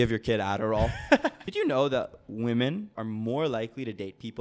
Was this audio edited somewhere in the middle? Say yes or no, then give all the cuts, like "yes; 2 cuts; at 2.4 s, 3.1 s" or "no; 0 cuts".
yes; 2 cuts; at 1.4 s, 2.9 s